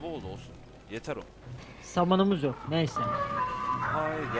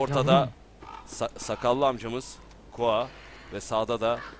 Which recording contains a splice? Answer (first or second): first